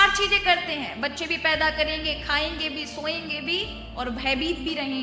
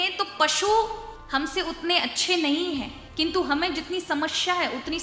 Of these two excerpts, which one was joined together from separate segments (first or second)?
second